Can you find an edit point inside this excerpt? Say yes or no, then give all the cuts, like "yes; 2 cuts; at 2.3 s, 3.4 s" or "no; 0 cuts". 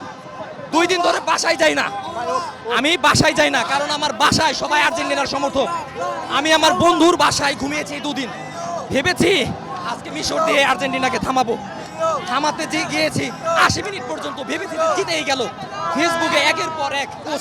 no; 0 cuts